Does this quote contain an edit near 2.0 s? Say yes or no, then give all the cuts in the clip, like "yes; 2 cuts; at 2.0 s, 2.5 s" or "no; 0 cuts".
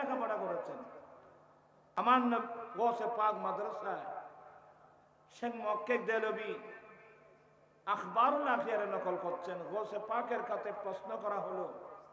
yes; 1 cut; at 2.0 s